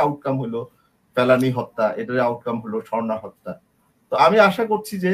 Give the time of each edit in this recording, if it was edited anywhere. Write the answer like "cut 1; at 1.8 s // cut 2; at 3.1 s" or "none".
none